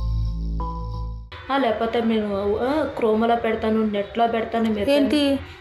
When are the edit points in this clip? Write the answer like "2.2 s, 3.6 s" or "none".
1.2 s

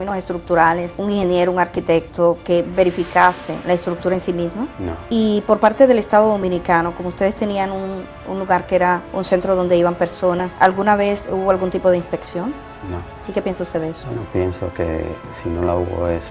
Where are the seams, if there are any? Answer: none

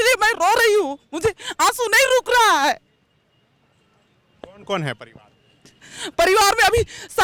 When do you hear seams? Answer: none

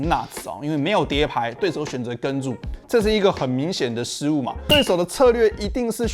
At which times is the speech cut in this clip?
1.6 s, 4.6 s

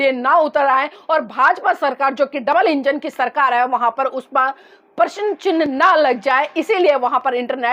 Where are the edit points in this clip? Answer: none

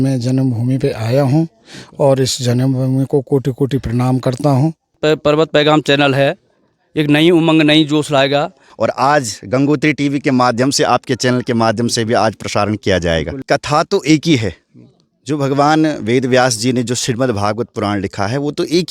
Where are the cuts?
5.0 s, 8.7 s, 13.4 s

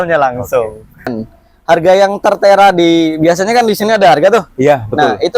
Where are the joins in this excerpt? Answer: 1.1 s

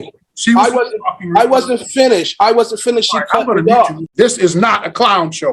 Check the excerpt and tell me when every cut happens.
4.0 s

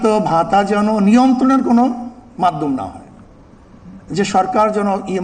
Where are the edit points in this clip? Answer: none

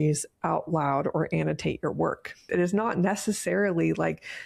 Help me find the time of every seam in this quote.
2.4 s

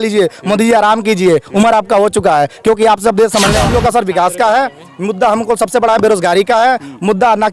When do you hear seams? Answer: 3.6 s

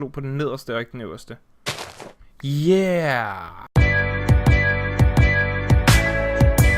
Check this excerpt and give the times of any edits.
3.5 s

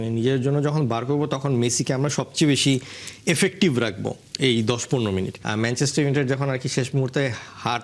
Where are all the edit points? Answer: 5.4 s

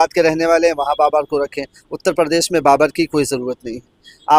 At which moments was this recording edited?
none

